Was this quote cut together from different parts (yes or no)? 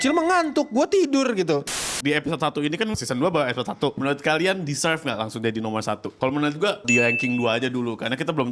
yes